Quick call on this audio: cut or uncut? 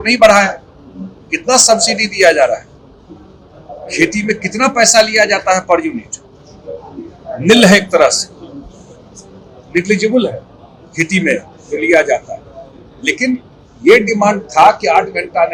uncut